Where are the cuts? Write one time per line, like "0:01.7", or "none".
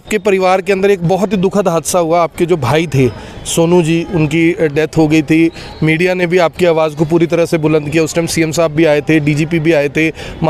none